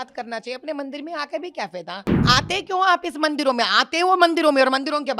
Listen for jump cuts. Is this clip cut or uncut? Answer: cut